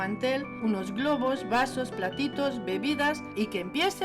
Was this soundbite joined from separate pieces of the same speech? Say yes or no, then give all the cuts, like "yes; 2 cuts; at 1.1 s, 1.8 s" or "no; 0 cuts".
no; 0 cuts